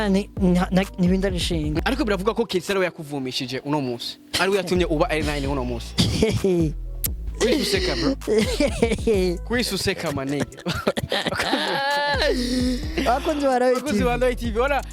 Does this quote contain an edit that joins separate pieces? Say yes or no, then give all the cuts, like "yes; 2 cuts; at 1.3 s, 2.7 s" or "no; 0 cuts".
yes; 1 cut; at 1.8 s